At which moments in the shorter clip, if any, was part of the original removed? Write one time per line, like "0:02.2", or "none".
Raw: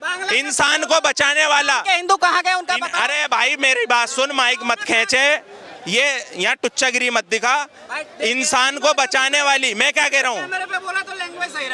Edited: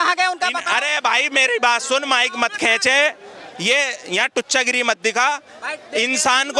none